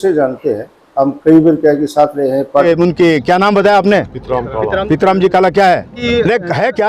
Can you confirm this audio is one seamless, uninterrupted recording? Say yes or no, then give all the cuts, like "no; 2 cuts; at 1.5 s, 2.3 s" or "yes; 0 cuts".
no; 2 cuts; at 2.7 s, 5.9 s